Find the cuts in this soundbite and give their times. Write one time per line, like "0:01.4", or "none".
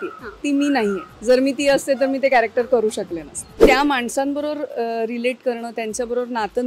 0:03.6